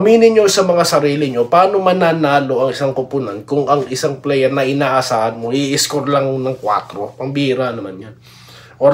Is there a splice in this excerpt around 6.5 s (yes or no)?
no